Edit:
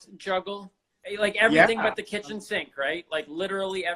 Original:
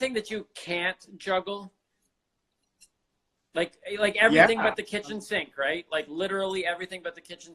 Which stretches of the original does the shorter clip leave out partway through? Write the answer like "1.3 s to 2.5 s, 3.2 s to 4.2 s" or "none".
2.0 s to 3.8 s